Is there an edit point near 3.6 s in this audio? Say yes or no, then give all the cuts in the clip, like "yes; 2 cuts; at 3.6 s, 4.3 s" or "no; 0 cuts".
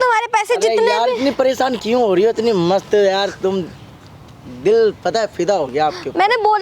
no; 0 cuts